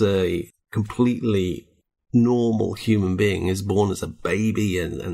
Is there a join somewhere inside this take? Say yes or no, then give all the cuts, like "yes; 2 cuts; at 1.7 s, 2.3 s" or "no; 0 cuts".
no; 0 cuts